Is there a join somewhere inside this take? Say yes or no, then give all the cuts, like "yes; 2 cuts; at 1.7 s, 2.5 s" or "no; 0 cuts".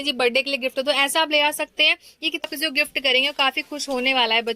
yes; 1 cut; at 2.5 s